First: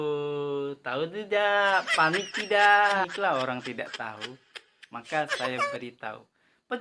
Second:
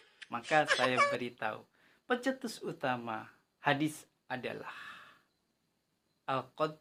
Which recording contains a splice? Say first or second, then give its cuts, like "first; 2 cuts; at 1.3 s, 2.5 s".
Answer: first; 1 cut; at 3.1 s